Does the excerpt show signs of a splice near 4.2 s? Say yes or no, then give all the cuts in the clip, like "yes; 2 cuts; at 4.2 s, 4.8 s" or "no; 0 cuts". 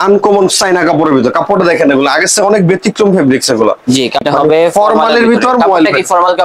yes; 1 cut; at 4.2 s